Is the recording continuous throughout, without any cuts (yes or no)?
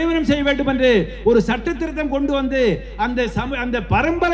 yes